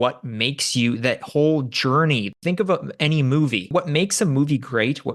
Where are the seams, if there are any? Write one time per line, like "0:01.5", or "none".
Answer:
0:02.3
0:03.7